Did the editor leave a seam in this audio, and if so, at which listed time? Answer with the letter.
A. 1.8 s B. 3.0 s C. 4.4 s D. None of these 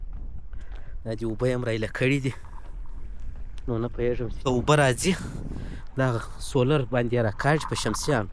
C